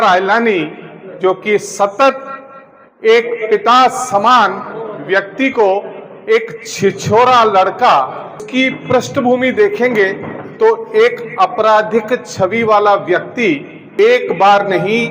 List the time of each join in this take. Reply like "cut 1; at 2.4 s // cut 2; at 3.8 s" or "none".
cut 1; at 8.4 s // cut 2; at 13.8 s